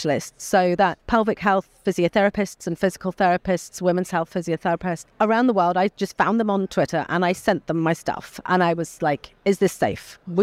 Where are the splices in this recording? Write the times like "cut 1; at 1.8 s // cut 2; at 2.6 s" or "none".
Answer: cut 1; at 1.0 s // cut 2; at 5.1 s